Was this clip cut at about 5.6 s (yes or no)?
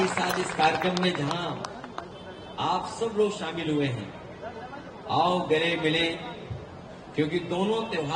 no